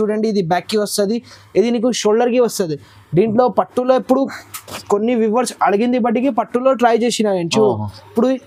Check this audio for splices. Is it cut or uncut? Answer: uncut